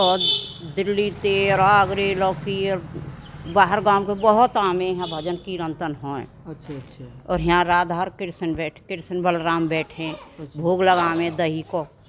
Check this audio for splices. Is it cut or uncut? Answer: uncut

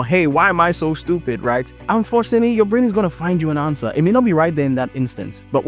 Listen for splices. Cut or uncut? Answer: cut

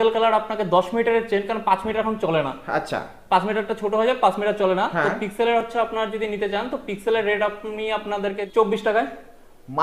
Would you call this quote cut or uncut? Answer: cut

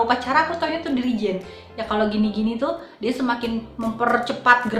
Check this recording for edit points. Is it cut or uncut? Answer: uncut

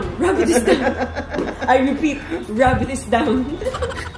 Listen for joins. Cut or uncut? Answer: uncut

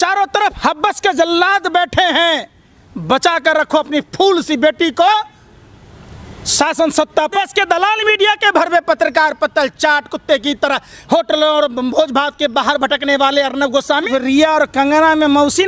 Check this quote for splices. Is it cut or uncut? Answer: cut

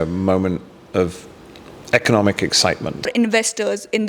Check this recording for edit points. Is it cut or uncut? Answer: cut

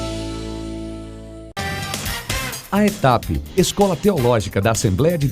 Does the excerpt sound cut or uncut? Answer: cut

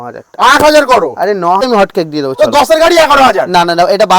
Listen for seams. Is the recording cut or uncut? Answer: cut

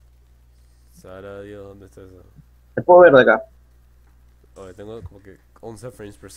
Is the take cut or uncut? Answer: cut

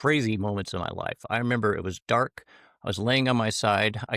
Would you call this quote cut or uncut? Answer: uncut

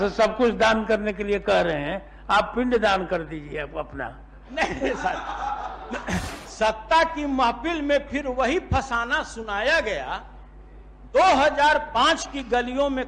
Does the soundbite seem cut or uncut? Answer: uncut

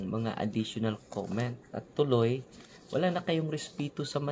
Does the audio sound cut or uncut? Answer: uncut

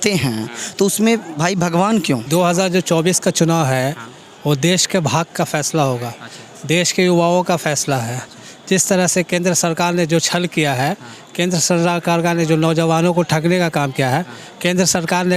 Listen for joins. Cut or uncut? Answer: cut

